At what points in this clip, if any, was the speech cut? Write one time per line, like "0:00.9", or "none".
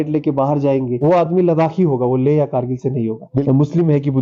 0:00.9
0:03.5